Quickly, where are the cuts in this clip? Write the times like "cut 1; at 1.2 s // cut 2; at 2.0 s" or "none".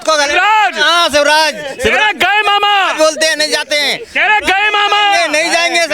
none